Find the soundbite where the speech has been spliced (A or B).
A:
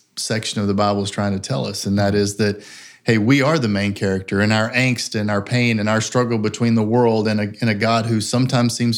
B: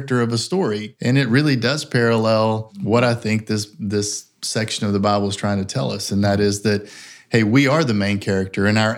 B